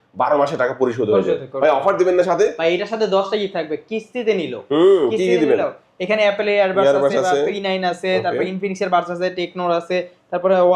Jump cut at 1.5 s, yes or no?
no